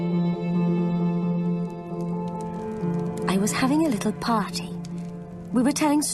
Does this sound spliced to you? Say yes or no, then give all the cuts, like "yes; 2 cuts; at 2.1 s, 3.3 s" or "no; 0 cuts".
yes; 1 cut; at 3.3 s